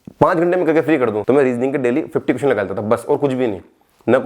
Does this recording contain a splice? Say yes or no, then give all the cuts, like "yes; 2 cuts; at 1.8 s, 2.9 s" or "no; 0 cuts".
yes; 1 cut; at 1.2 s